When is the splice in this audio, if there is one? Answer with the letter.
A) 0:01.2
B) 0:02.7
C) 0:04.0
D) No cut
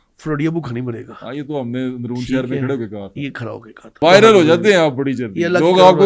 C